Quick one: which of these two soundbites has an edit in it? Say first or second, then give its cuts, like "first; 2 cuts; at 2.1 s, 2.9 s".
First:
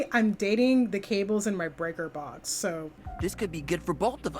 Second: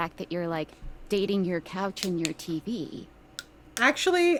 first; 1 cut; at 3.0 s